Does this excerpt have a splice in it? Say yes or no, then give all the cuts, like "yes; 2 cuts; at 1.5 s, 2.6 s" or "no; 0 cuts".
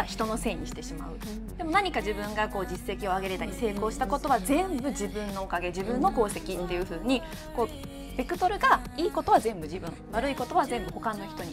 no; 0 cuts